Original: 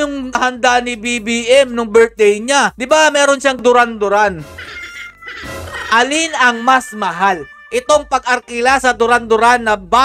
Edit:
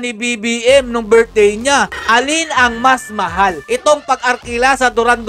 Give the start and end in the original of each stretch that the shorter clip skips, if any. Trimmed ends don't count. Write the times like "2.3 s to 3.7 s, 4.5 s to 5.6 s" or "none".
2.8 s to 5.8 s, 7.4 s to 7.6 s